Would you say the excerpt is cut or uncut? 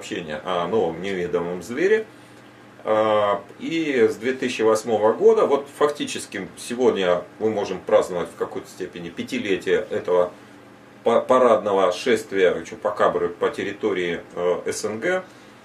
uncut